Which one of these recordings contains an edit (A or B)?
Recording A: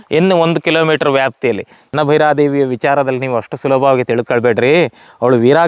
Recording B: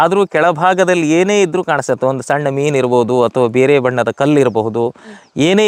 A